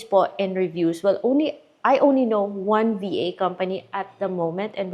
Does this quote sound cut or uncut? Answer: uncut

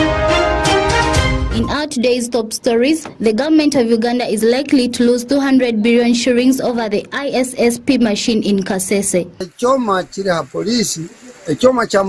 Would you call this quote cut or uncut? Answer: cut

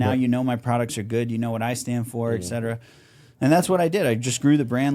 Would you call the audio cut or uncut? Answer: uncut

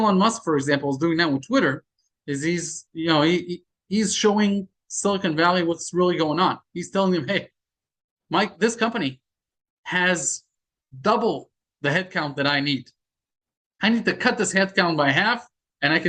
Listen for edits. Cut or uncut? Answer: uncut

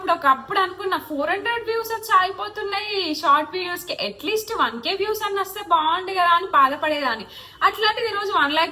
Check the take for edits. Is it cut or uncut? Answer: uncut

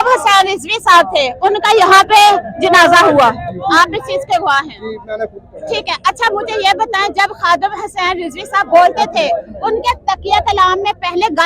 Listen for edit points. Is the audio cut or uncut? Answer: uncut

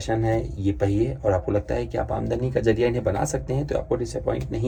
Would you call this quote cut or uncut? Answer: uncut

